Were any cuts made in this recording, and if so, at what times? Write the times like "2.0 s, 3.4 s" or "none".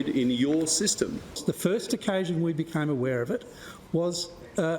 1.3 s